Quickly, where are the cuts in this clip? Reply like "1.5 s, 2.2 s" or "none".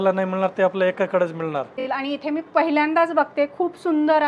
1.8 s